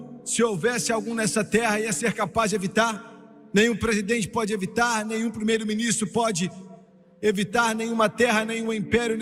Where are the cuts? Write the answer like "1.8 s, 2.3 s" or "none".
none